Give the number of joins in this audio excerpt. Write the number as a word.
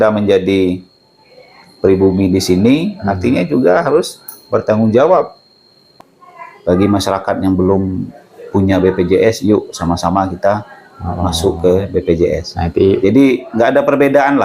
one